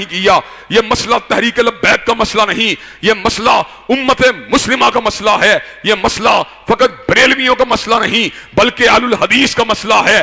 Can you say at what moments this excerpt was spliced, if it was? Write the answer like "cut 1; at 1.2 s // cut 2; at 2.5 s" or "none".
none